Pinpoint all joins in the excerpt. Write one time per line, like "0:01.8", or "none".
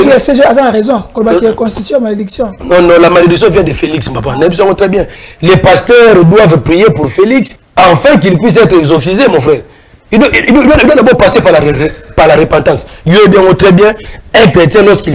0:05.2
0:07.6

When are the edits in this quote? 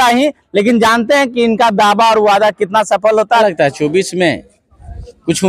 0:03.4

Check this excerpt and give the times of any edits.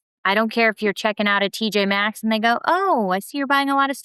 none

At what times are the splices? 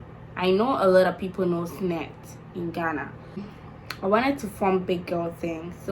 0:03.5

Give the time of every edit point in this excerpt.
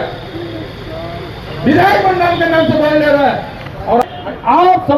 0:04.0

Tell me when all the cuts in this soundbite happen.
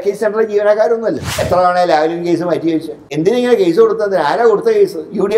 0:01.4
0:03.1

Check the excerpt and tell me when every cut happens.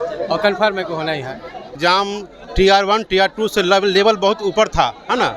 0:01.7

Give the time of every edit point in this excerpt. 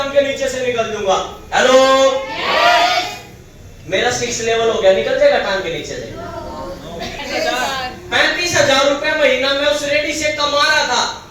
0:07.2

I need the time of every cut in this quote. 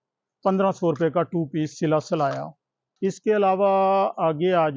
none

